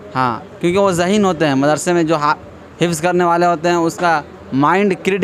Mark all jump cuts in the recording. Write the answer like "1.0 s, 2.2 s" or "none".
none

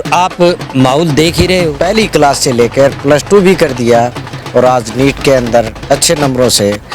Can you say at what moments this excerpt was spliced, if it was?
1.7 s

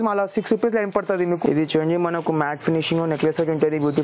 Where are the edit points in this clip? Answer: 1.4 s

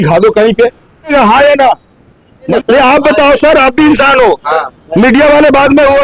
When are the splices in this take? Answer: 1.1 s, 2.5 s

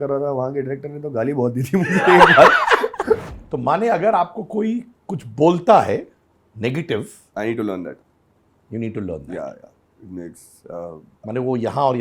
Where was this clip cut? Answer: 3.3 s

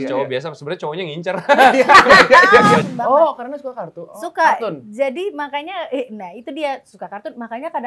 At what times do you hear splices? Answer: 2.8 s

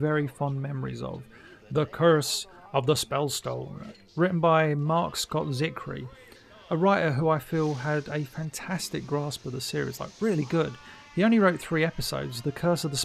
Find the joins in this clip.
9.1 s

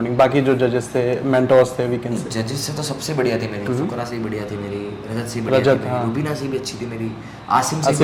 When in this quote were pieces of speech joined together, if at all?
none

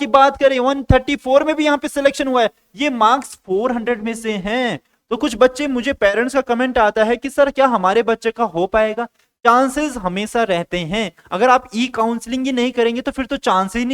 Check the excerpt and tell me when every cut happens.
none

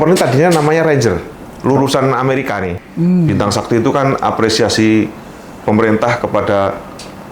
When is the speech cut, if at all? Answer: 2.8 s

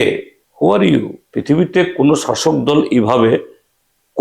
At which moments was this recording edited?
1.2 s

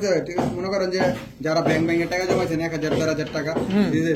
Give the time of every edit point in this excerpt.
none

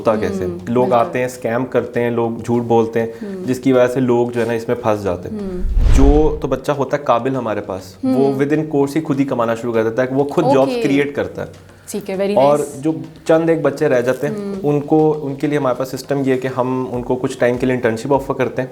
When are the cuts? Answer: 5.8 s

